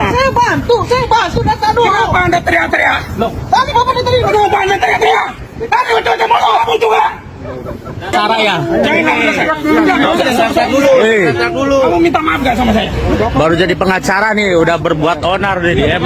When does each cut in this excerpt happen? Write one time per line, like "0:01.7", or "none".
0:08.1